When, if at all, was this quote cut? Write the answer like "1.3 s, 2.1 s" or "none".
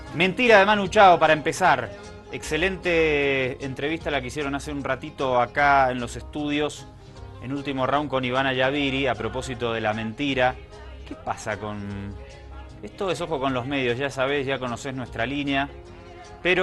14.3 s